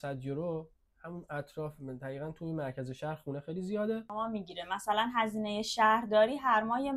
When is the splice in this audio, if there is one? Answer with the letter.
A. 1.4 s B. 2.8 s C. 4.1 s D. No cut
C